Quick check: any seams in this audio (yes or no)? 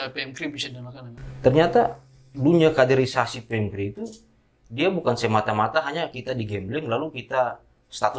yes